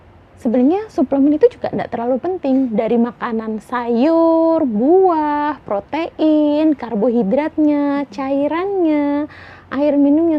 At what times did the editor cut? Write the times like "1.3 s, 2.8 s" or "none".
none